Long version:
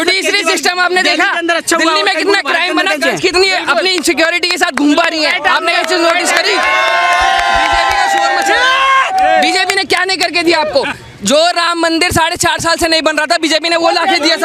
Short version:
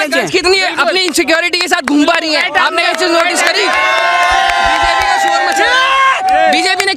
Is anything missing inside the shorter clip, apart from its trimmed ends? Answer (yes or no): no